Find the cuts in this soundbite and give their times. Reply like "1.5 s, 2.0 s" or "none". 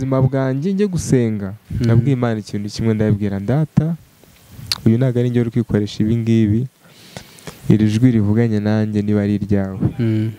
1.6 s